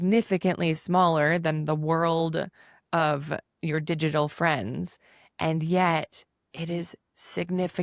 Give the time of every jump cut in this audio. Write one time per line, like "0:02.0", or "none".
none